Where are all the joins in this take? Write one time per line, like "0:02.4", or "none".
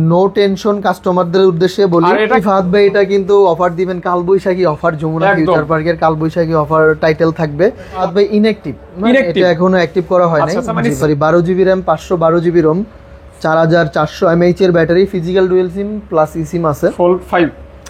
0:02.4
0:08.0
0:11.0